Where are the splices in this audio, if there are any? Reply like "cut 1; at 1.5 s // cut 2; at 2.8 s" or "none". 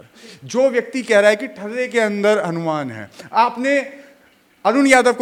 none